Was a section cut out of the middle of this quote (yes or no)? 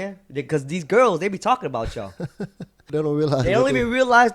yes